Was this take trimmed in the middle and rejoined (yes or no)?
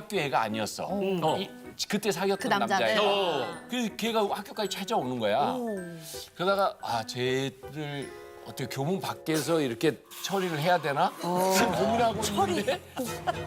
no